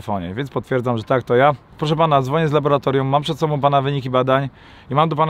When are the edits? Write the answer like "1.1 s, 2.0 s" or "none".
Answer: 1.7 s